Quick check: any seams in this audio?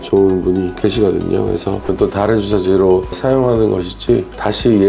yes; 1 cut; at 1.9 s

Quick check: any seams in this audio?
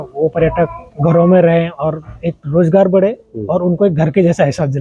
no; 0 cuts

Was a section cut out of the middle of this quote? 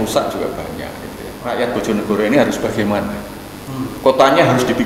yes; 1 cut; at 1.4 s

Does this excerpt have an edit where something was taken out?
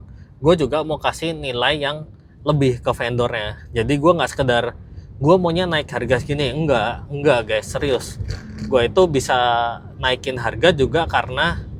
no; 0 cuts

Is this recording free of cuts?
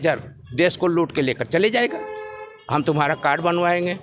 yes; 0 cuts

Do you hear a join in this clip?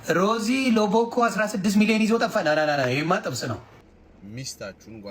yes; 1 cut; at 3.7 s

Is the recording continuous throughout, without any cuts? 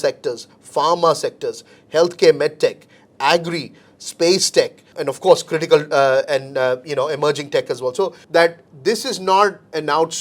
no; 2 cuts; at 4.9 s, 8.2 s

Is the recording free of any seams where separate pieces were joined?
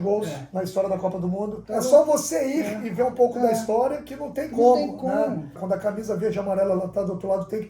no; 2 cuts; at 1.6 s, 5.6 s

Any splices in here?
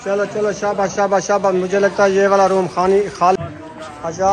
yes; 1 cut; at 3.4 s

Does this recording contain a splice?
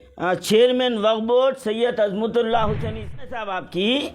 yes; 1 cut; at 3.1 s

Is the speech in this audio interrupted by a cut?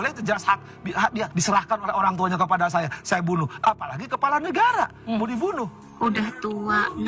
yes; 2 cuts; at 1.3 s, 5.7 s

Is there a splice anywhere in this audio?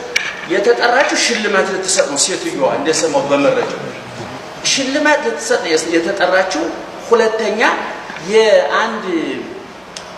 no; 0 cuts

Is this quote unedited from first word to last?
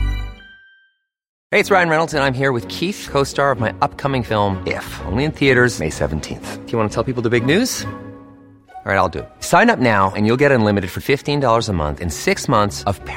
no; 1 cut; at 1.3 s

